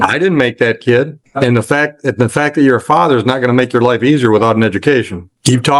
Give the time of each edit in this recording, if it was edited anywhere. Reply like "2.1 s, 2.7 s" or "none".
none